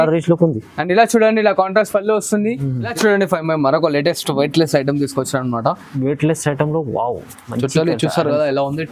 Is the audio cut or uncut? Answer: cut